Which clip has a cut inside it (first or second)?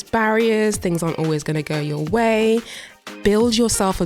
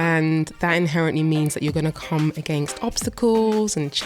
first